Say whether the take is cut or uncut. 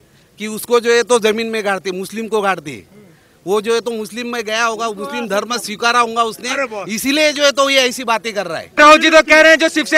cut